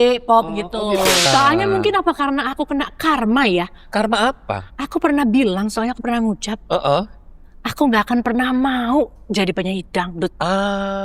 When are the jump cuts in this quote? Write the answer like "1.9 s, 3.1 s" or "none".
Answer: 1.3 s